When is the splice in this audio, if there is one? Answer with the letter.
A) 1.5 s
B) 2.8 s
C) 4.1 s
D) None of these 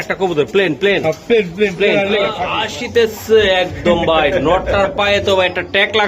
B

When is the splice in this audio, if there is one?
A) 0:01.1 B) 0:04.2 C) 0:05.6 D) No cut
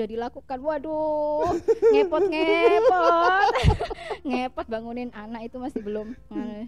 D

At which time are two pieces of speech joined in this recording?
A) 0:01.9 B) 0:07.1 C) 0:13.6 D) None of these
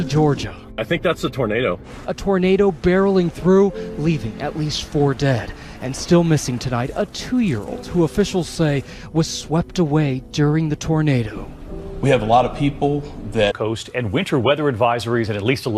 D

